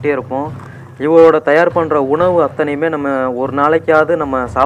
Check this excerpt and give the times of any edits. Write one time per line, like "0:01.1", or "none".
none